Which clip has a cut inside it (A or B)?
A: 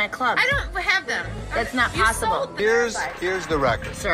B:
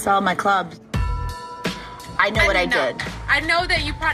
A